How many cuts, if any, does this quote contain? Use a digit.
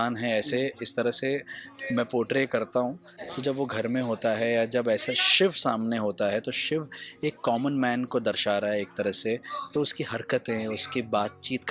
0